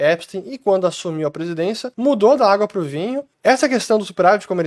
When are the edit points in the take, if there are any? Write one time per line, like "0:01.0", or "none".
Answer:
0:01.9
0:03.3